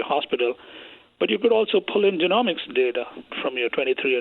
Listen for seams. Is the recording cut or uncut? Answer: cut